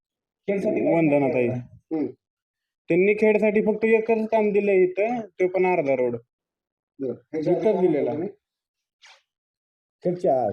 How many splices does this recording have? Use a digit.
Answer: 0